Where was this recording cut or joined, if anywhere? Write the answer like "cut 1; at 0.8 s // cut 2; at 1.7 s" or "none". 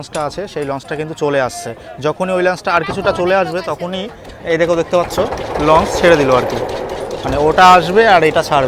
none